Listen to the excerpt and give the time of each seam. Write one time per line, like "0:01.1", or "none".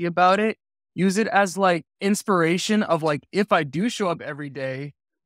0:01.9